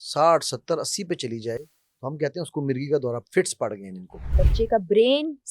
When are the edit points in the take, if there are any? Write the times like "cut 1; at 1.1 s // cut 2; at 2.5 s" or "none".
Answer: cut 1; at 4.3 s